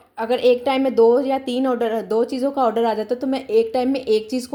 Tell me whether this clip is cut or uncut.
uncut